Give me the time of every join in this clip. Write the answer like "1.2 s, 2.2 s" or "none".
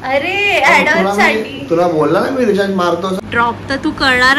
3.2 s